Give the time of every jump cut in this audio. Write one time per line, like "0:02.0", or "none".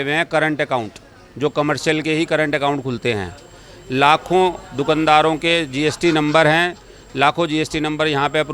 none